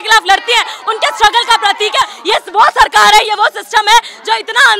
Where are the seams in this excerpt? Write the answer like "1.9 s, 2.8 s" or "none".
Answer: 2.2 s